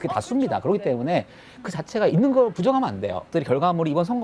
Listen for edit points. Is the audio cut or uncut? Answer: cut